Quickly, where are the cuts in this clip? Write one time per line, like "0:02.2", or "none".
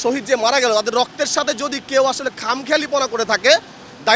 none